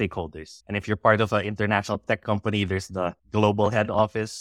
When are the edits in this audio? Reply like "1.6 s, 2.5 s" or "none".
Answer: none